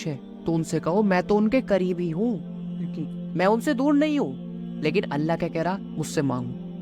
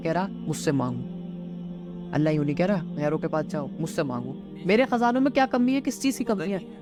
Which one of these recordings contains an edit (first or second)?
first